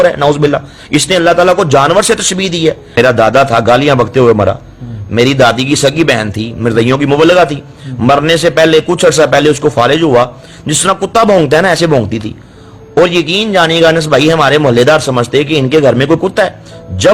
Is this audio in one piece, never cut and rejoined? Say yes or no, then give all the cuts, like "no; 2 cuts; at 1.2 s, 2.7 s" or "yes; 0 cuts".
no; 1 cut; at 3.0 s